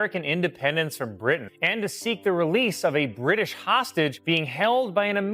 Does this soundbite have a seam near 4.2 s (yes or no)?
yes